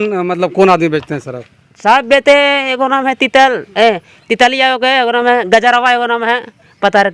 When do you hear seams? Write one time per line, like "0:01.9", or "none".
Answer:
none